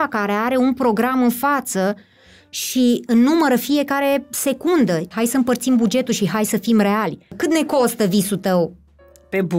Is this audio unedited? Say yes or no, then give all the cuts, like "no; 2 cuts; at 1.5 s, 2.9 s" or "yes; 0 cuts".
no; 2 cuts; at 5.1 s, 7.4 s